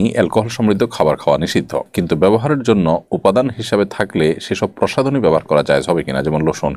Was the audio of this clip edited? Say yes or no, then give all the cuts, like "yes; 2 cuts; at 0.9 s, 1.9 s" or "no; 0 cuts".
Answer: no; 0 cuts